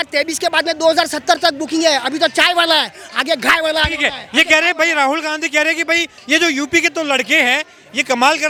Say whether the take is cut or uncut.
uncut